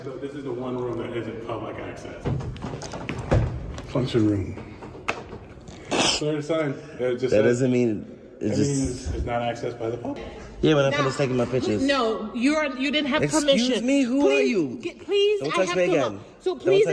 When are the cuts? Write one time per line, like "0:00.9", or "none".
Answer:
0:02.2
0:04.8
0:10.2